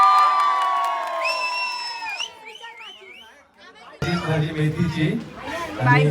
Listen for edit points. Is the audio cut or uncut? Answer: cut